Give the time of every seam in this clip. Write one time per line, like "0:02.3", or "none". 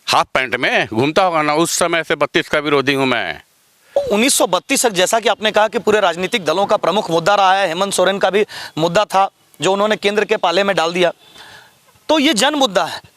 0:03.9